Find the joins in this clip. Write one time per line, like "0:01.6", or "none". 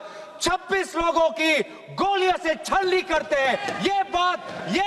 none